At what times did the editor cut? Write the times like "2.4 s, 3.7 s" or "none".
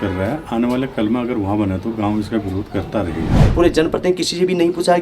3.2 s